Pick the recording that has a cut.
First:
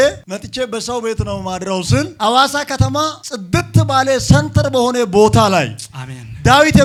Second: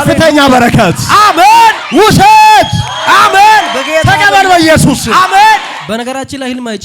second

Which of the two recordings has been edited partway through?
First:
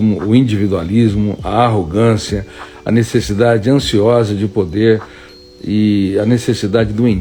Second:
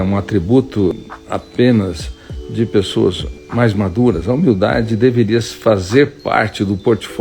second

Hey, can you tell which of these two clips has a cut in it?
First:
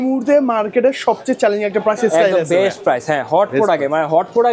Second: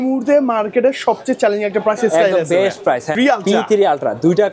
second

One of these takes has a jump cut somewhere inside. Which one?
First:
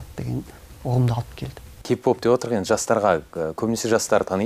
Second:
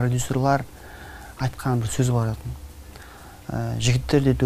second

